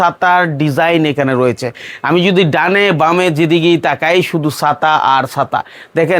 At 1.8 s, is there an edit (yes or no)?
no